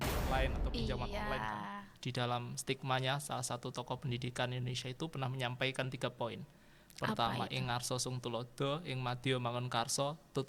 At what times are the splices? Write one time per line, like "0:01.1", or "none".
0:01.8